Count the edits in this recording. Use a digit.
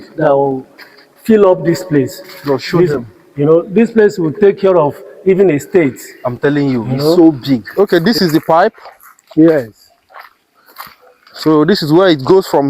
1